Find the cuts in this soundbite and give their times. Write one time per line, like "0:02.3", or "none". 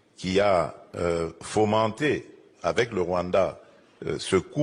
0:01.7